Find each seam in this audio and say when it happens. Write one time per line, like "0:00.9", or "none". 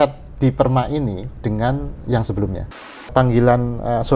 0:02.9